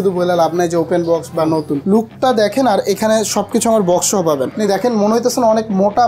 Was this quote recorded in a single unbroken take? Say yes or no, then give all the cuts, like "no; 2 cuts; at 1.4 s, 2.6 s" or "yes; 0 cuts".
no; 2 cuts; at 1.8 s, 4.5 s